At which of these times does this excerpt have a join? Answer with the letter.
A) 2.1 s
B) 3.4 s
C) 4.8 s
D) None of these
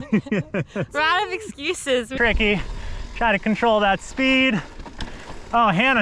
A